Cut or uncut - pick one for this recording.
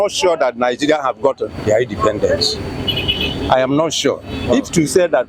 uncut